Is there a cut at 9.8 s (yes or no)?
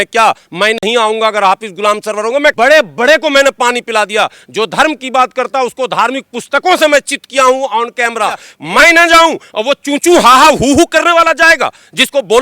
no